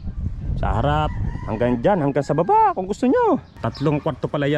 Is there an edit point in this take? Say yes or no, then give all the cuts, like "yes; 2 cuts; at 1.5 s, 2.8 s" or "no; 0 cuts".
yes; 1 cut; at 3.5 s